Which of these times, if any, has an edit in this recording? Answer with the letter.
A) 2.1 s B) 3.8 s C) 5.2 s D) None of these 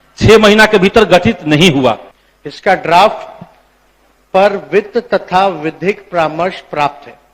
A